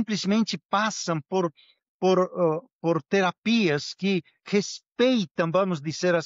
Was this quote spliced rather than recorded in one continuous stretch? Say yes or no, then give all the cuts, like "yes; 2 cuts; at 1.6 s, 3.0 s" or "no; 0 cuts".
no; 0 cuts